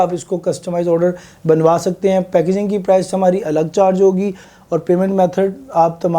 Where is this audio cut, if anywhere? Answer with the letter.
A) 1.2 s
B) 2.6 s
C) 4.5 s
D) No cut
C